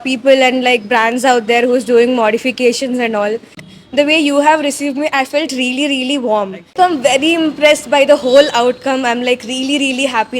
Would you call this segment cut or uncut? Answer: cut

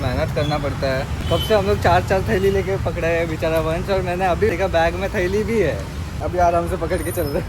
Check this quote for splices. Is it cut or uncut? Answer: cut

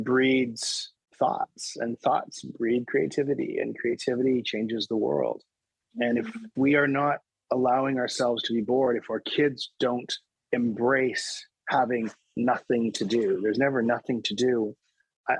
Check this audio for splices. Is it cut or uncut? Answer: uncut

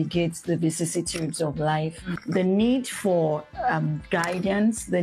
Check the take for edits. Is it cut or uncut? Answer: cut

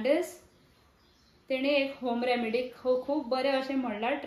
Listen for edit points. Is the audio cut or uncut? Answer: uncut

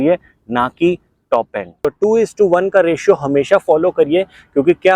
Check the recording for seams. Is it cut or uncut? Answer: cut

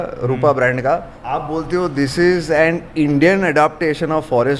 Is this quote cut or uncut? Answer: cut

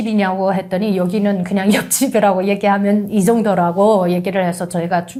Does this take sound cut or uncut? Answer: uncut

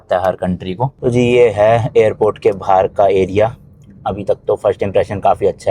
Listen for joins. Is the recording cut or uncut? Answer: cut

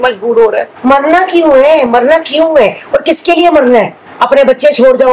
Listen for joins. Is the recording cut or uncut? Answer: uncut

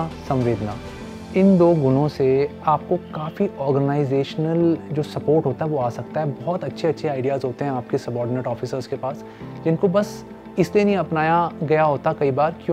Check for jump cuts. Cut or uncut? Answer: cut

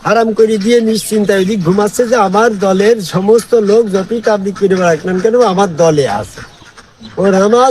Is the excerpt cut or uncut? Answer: uncut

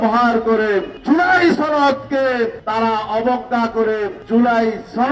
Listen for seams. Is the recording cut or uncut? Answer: cut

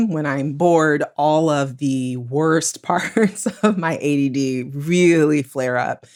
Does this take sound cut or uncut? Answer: uncut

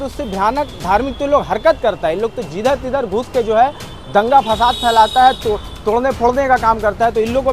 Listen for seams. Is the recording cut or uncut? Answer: uncut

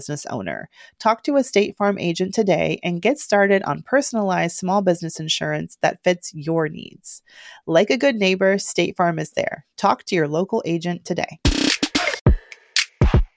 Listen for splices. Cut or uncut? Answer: cut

